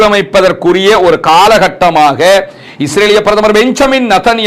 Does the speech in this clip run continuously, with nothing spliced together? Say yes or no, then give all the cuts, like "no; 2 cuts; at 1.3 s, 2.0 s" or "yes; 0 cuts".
yes; 0 cuts